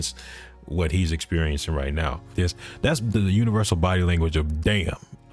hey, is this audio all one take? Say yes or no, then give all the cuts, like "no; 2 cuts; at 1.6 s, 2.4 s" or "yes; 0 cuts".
no; 1 cut; at 2.3 s